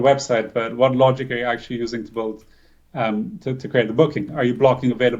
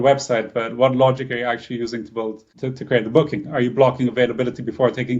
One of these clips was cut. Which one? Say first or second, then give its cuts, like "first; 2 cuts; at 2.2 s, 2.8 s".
second; 1 cut; at 2.5 s